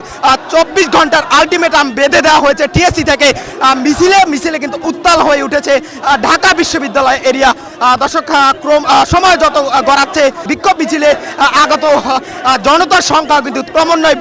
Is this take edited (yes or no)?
no